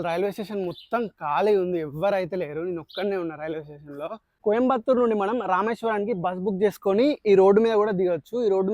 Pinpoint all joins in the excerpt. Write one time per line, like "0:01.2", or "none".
0:04.3